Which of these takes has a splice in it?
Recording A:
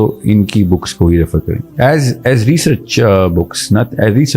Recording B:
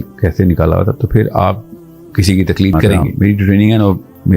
B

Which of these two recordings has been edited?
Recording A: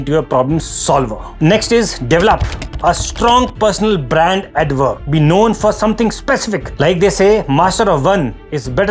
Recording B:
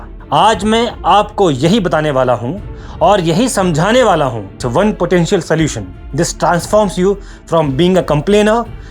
B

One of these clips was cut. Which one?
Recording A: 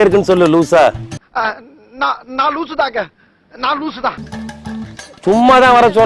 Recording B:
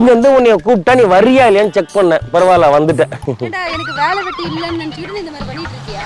A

